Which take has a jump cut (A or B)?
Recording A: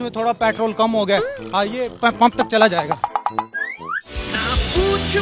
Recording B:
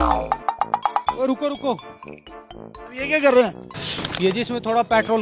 A